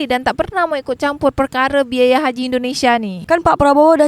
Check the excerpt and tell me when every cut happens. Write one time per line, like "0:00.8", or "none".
0:03.1